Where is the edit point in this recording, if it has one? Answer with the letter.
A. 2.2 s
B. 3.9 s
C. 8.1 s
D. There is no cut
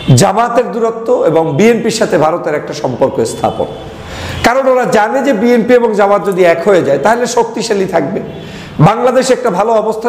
D